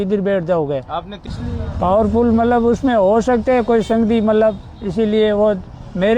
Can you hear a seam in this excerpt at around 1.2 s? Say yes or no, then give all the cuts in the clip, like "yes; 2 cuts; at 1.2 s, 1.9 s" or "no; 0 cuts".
yes; 1 cut; at 1.2 s